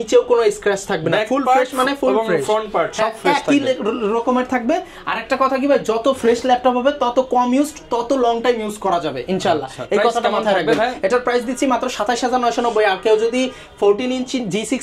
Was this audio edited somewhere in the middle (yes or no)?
no